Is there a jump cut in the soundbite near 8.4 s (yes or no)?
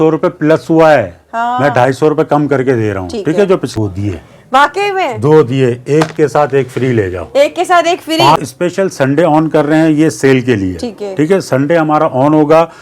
yes